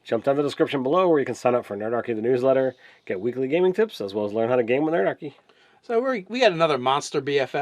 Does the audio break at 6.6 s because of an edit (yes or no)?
yes